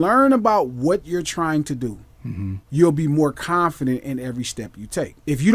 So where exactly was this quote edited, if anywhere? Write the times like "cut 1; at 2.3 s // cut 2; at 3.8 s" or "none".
none